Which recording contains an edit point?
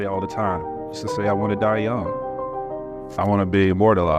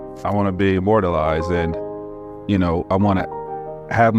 first; 1 cut; at 1.0 s

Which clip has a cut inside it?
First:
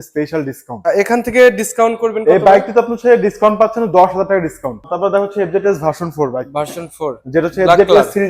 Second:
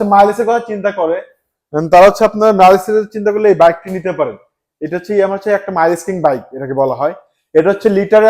first; 2 cuts; at 0.9 s, 4.9 s

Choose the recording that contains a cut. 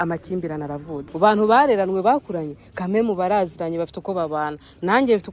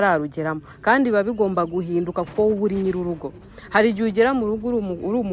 first; 1 cut; at 1.1 s

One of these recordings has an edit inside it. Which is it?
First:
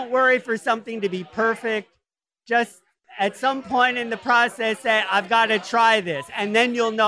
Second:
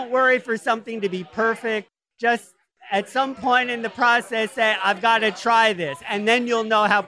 second; 1 cut; at 2.0 s

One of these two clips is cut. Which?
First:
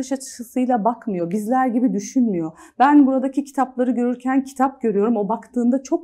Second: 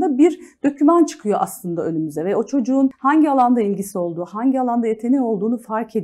second; 1 cut; at 3.0 s

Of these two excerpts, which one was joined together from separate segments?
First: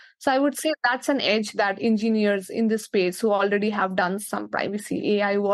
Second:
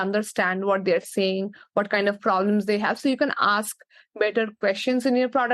first; 1 cut; at 4.2 s

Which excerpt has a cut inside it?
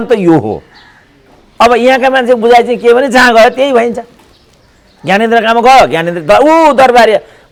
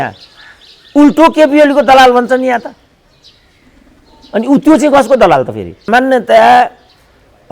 second; 1 cut; at 5.8 s

